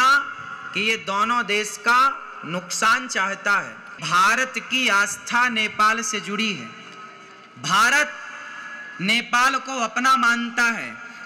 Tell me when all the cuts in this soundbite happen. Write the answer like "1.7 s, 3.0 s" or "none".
4.0 s